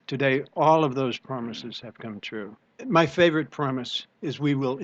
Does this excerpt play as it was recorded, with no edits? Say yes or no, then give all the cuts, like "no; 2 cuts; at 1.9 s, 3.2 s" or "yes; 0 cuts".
no; 1 cut; at 2.7 s